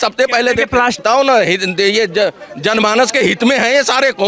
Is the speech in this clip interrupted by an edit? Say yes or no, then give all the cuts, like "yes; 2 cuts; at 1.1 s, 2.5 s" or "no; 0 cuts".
yes; 1 cut; at 1.0 s